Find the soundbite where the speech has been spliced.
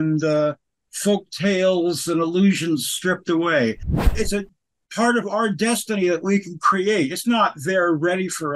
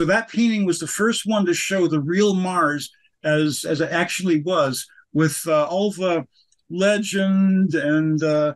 first; 1 cut; at 4.1 s

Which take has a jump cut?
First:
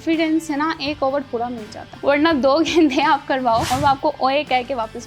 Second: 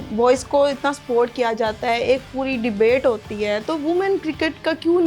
first; 2 cuts; at 1.9 s, 3.7 s

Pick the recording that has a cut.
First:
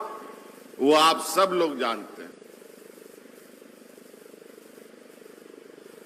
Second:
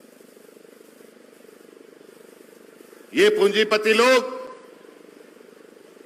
first; 1 cut; at 2.3 s

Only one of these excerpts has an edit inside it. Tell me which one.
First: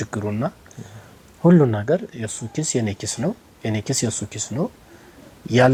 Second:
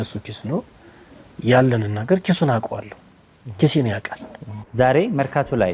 second; 1 cut; at 4.7 s

